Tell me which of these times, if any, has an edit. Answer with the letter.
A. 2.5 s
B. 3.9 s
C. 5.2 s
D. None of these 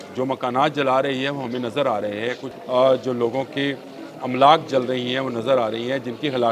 A